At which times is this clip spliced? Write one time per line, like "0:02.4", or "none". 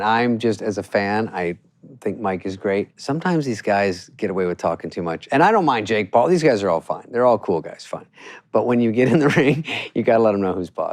0:03.0
0:05.2